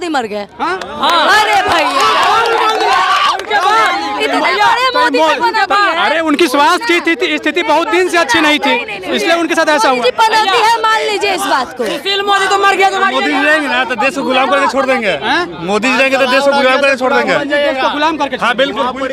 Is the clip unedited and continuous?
yes; 0 cuts

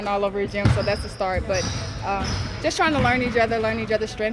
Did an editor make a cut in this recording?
no; 0 cuts

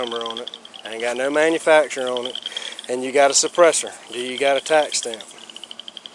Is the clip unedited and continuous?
yes; 0 cuts

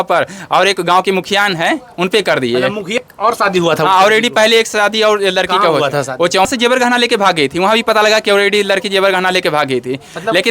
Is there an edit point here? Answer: yes; 2 cuts; at 3.0 s, 6.5 s

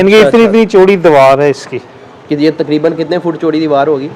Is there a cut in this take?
no; 0 cuts

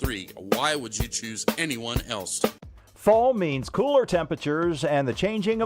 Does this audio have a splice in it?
yes; 1 cut; at 2.6 s

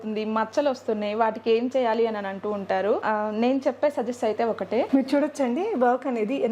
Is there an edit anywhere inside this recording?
yes; 2 cuts; at 3.0 s, 4.9 s

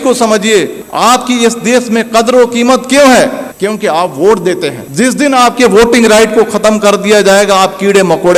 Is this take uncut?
yes; 0 cuts

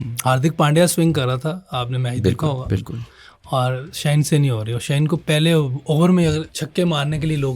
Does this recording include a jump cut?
yes; 2 cuts; at 5.2 s, 6.6 s

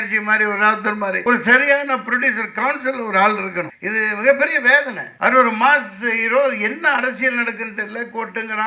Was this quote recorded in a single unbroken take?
no; 3 cuts; at 1.2 s, 3.8 s, 5.0 s

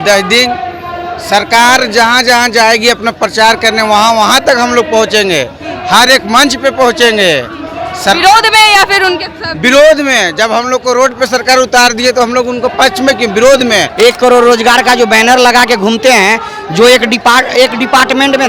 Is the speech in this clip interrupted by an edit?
yes; 1 cut; at 13.9 s

